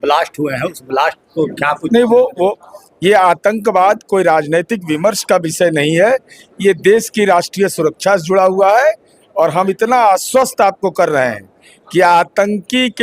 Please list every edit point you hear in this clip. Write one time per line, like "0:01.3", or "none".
0:02.7